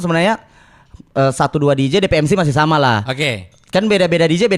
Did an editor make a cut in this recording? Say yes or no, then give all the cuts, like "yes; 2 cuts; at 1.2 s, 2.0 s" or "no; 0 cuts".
no; 0 cuts